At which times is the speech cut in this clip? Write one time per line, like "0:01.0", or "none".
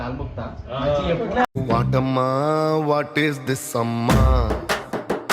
0:01.5